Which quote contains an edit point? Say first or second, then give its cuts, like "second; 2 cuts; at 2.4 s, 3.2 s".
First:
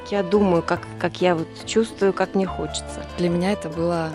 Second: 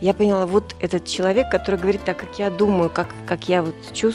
first; 1 cut; at 3.1 s